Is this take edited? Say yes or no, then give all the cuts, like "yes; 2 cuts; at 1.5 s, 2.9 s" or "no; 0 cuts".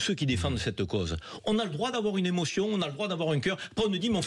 no; 0 cuts